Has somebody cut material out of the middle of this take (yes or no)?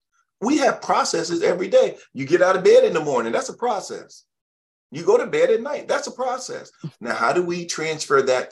no